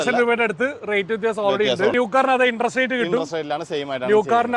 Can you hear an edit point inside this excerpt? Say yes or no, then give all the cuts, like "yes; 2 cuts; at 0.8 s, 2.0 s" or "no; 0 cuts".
yes; 1 cut; at 1.9 s